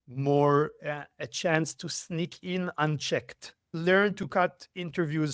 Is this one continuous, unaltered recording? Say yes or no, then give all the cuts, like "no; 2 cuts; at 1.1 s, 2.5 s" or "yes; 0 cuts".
no; 1 cut; at 3.7 s